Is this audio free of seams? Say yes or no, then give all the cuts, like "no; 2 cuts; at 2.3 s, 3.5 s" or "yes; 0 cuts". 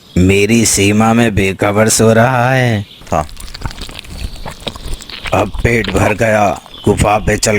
no; 1 cut; at 3.0 s